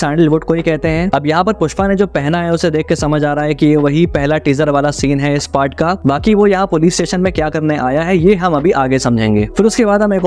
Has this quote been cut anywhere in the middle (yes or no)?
no